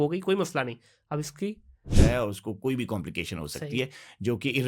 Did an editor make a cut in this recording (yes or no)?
yes